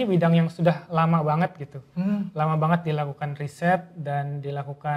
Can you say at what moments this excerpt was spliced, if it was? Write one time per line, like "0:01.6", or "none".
none